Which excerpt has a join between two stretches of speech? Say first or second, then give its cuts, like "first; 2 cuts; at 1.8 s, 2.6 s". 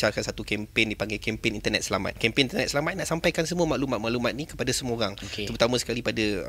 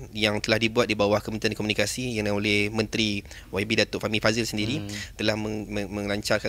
first; 1 cut; at 2.2 s